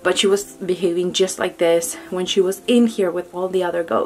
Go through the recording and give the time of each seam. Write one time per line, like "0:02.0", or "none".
none